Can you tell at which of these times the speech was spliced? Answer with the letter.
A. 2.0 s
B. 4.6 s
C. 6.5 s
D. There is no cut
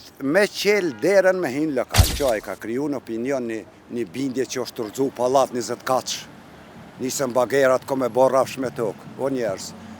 A